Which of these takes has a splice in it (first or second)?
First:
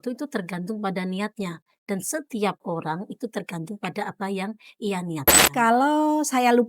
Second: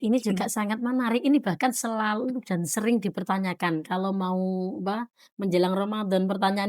first